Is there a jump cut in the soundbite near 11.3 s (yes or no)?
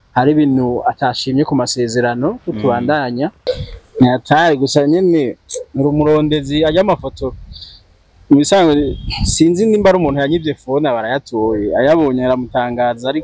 no